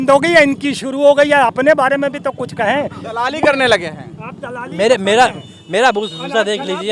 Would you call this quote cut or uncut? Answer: uncut